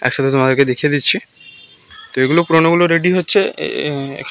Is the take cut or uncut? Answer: uncut